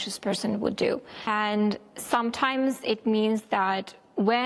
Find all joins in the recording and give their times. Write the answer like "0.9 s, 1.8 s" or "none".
1.3 s